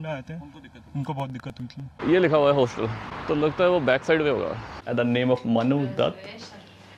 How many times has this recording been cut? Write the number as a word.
two